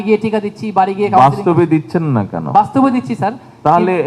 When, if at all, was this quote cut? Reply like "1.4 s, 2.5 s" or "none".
none